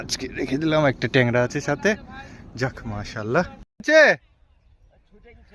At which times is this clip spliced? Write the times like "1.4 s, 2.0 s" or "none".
3.8 s